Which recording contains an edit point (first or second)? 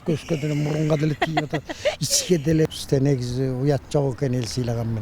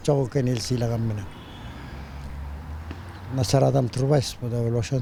first